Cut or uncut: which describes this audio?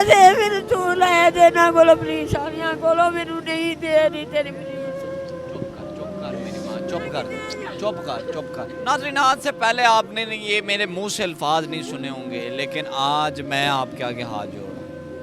cut